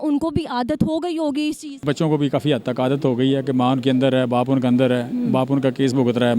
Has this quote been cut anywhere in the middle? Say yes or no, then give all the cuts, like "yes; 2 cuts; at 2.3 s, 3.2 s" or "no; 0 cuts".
yes; 1 cut; at 1.8 s